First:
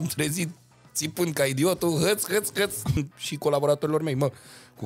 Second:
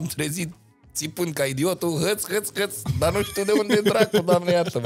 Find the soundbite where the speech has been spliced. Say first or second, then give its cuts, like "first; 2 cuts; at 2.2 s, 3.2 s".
first; 1 cut; at 2.9 s